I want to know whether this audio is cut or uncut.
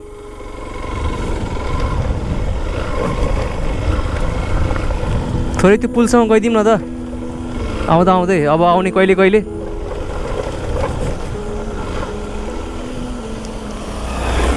uncut